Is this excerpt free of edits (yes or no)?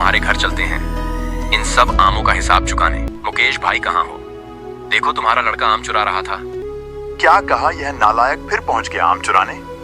no